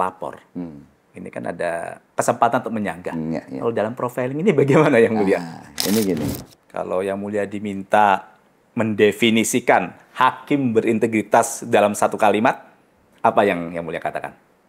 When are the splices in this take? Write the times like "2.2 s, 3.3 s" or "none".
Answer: 2.0 s, 6.4 s